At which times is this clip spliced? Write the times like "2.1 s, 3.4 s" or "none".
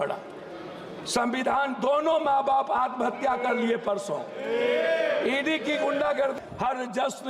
6.4 s